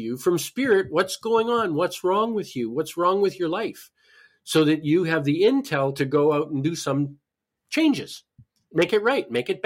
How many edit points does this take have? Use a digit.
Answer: 1